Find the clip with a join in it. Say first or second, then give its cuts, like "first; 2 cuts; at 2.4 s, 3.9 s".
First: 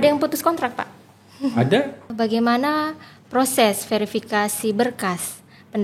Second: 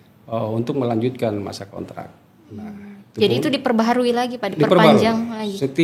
first; 1 cut; at 2.1 s